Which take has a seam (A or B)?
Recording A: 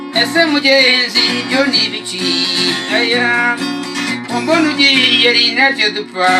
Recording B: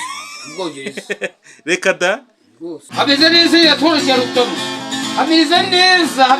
B